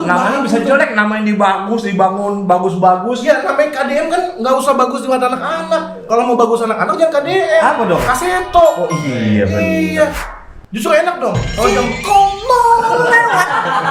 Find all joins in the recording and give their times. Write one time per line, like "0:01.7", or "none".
none

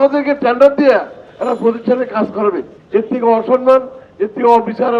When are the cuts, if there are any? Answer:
none

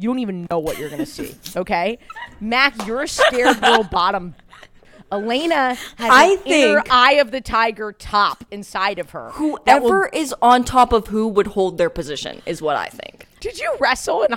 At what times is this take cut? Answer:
0:13.4

